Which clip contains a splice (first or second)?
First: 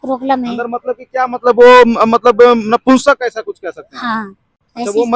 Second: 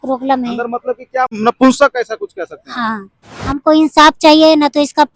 second